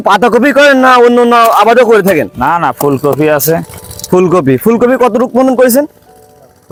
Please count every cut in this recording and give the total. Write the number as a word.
zero